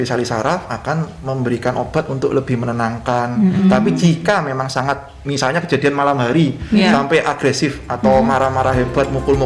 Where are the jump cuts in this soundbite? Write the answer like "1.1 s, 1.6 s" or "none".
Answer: none